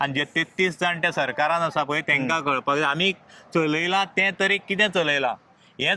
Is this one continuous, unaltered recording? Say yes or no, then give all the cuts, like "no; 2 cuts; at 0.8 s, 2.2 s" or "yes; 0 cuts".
yes; 0 cuts